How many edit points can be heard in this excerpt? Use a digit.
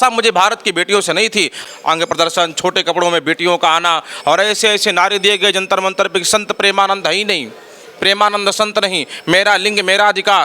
1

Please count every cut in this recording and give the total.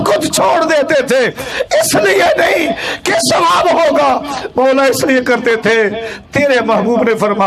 0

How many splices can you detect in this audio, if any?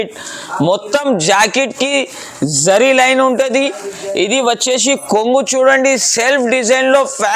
0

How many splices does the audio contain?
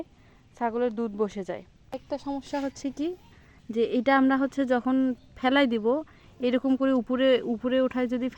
1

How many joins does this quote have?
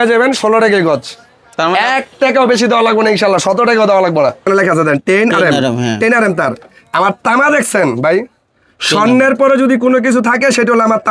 1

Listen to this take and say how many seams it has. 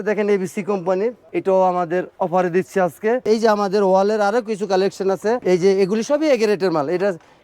3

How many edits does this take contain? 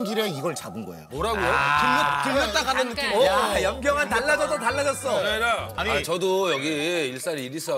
1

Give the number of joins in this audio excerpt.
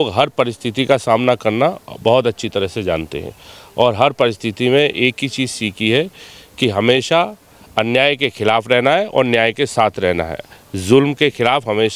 0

